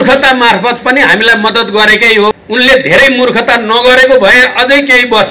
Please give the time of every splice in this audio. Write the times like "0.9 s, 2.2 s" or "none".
2.3 s